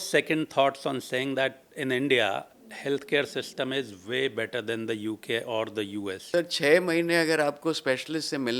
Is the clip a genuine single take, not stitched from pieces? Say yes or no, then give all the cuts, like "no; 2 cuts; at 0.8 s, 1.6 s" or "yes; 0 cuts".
no; 1 cut; at 6.3 s